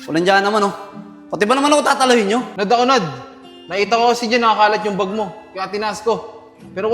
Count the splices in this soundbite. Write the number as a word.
one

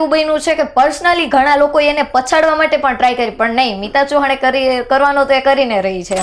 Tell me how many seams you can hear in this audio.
zero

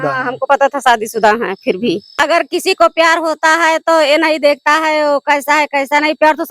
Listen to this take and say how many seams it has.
one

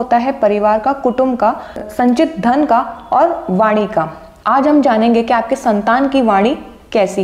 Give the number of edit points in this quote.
one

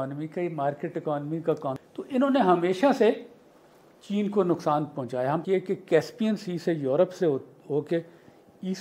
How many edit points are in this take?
two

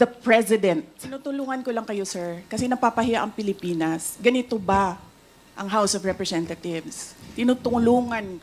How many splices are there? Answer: one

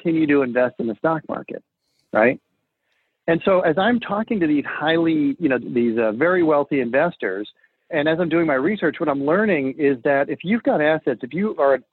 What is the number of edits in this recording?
zero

